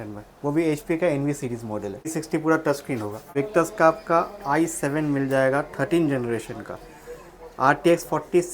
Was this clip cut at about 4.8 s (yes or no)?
no